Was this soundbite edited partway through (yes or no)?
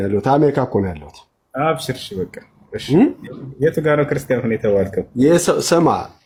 no